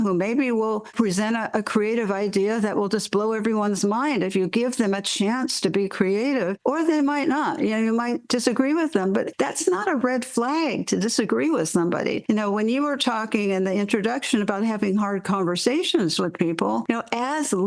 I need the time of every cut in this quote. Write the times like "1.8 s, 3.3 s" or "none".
0.9 s